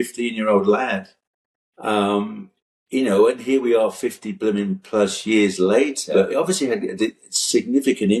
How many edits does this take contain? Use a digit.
1